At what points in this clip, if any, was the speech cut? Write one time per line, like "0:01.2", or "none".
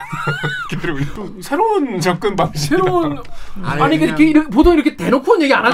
none